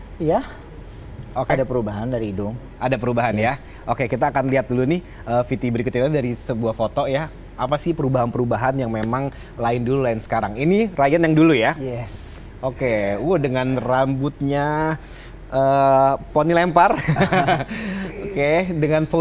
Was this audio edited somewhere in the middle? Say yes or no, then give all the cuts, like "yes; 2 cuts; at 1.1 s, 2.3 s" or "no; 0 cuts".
no; 0 cuts